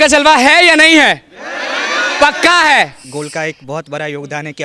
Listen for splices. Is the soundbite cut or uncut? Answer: cut